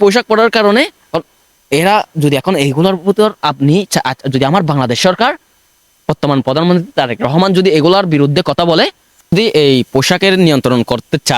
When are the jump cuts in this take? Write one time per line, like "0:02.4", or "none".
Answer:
0:09.3